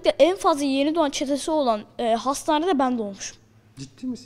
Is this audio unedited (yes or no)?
yes